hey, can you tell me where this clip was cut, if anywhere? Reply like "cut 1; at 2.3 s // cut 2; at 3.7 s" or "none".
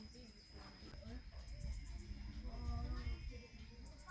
cut 1; at 0.9 s